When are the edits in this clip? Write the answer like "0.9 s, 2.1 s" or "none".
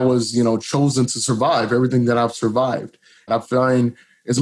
3.3 s